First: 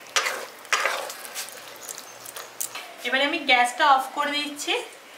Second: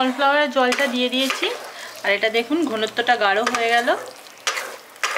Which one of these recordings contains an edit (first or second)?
first